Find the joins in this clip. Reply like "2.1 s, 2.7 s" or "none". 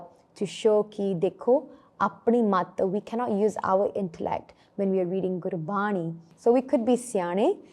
6.2 s